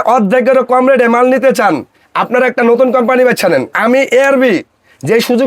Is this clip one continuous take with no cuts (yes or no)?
no